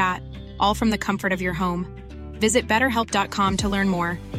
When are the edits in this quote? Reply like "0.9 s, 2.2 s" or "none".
none